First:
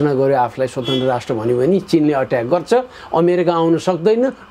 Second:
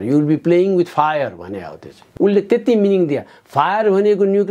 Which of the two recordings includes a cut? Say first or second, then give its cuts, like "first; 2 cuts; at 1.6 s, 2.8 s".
second; 1 cut; at 2.1 s